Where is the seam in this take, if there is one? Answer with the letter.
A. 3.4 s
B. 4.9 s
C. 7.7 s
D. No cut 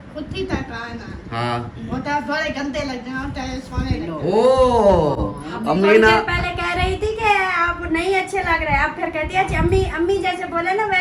D